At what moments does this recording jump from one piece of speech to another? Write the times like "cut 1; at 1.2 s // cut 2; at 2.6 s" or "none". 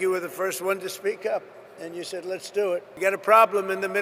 cut 1; at 2.9 s